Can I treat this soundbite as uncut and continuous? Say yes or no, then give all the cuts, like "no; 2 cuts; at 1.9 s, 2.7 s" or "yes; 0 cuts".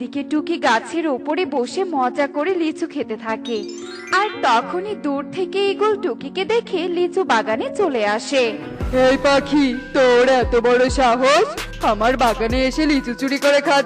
yes; 0 cuts